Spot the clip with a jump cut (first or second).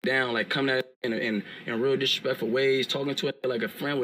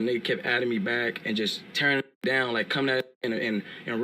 second